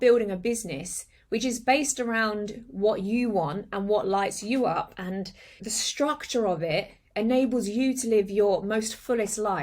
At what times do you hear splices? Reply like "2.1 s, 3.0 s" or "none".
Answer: 5.6 s